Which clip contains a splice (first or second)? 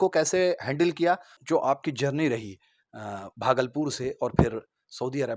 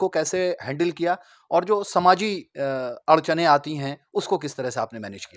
first